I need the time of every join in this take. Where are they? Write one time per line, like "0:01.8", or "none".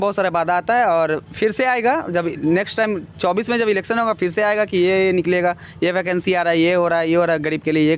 none